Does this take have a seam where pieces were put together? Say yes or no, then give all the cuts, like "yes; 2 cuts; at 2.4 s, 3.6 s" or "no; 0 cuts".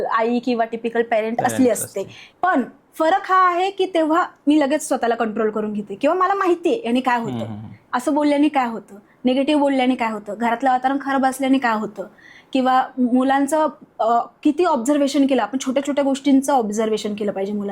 no; 0 cuts